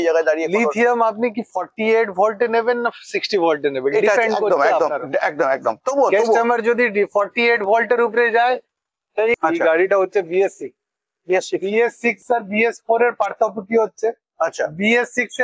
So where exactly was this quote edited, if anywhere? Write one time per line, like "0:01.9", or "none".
0:09.4